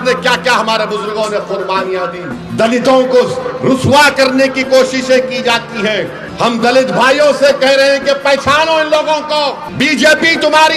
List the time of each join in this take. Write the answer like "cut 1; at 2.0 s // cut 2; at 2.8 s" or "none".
cut 1; at 2.4 s // cut 2; at 6.2 s // cut 3; at 9.6 s